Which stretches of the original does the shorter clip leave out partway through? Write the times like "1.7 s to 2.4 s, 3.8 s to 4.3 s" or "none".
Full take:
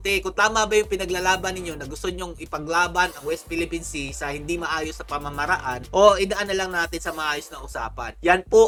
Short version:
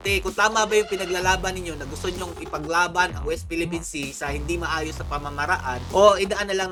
none